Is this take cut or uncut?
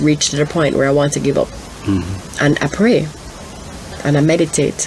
uncut